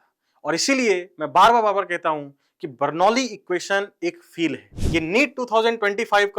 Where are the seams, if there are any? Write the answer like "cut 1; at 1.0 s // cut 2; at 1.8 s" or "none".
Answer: cut 1; at 4.7 s